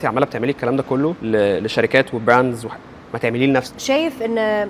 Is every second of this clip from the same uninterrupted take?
no; 2 cuts; at 1.2 s, 3.7 s

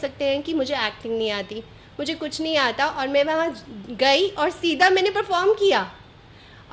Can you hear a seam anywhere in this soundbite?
no; 0 cuts

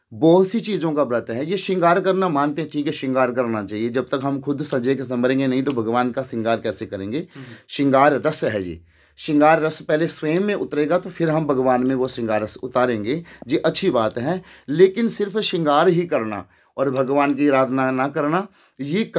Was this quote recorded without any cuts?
yes; 0 cuts

